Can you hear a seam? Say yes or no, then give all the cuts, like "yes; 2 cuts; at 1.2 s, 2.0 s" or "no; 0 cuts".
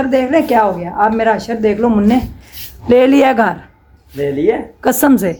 no; 0 cuts